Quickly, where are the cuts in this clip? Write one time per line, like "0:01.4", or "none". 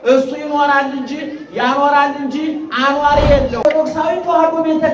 0:03.6

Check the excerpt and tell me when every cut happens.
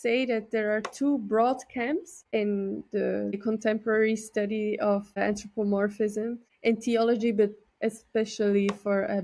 0:02.3
0:03.4
0:05.2
0:06.5

